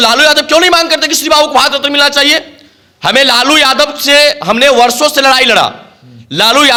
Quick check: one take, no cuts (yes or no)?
yes